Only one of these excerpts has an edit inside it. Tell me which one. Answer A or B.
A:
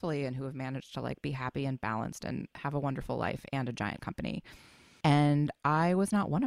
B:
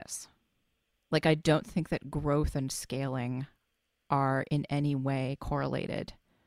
A